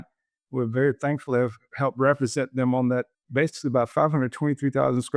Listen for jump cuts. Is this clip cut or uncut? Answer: cut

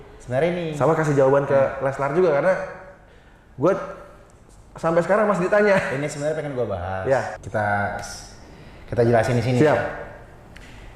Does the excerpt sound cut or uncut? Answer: cut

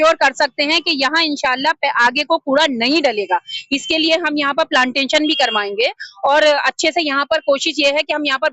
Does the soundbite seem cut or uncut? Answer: uncut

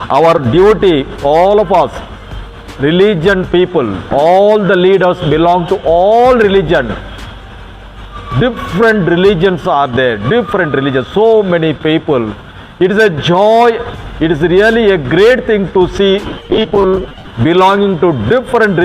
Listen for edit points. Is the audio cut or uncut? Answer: uncut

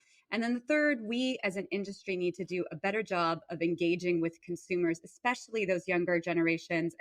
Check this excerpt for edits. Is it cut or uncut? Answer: uncut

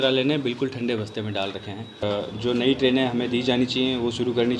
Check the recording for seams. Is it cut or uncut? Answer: cut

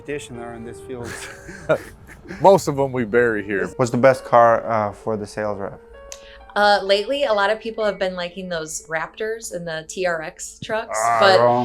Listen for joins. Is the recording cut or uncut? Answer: cut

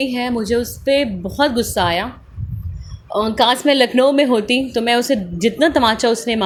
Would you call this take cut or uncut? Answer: uncut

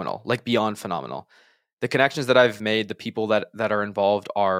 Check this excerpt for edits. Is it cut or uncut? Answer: cut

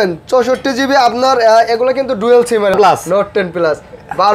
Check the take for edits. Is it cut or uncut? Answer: cut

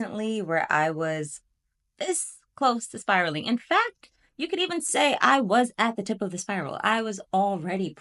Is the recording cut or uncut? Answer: uncut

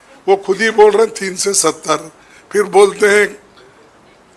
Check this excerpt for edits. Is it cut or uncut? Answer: uncut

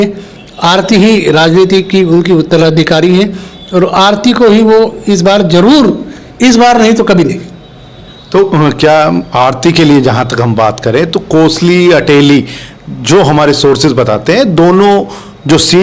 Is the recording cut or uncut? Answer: uncut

